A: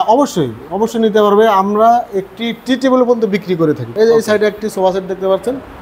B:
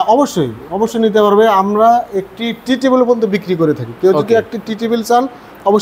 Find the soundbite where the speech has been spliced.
A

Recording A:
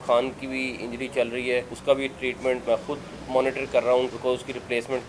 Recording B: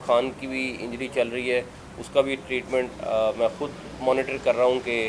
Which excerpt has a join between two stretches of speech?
A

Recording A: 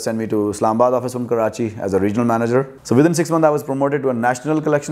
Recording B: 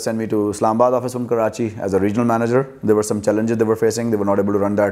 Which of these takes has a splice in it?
A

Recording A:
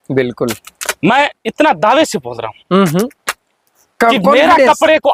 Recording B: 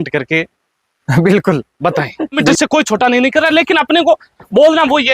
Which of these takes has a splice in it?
B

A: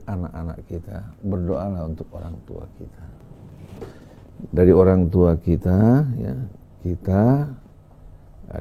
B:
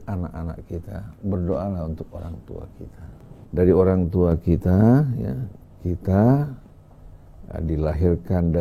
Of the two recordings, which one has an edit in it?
B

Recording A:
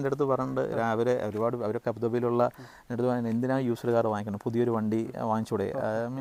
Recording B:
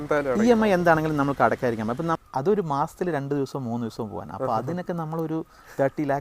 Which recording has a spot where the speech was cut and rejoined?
B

